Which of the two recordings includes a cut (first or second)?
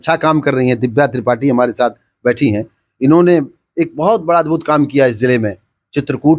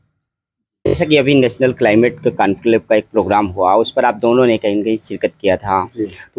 second